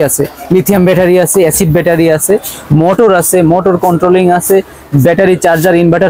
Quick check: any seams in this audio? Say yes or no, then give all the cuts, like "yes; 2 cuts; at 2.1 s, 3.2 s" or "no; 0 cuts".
no; 0 cuts